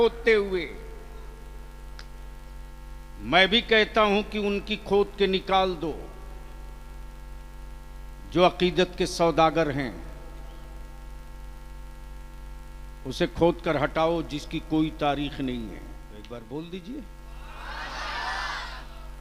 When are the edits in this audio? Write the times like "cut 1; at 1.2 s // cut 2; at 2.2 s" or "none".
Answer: cut 1; at 16.1 s